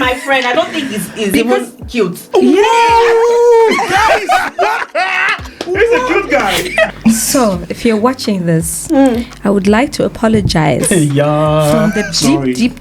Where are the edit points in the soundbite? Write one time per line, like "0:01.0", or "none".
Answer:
0:06.9